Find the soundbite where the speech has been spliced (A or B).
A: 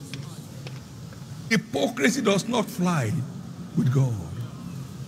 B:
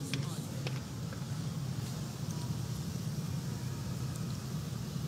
A